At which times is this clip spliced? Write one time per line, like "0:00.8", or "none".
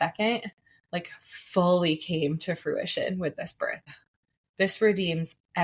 0:03.9